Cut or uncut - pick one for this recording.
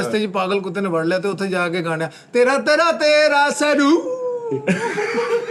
uncut